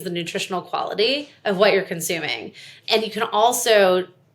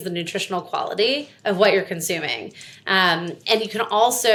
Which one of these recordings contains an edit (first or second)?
first